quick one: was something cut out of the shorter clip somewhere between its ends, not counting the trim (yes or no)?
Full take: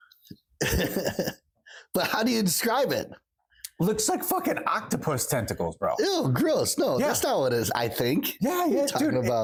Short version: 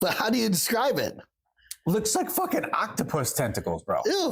no